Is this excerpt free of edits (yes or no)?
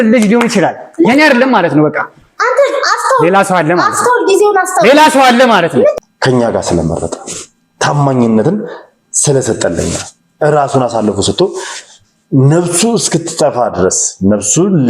no